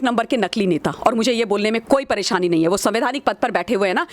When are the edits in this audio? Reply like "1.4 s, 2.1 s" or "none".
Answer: none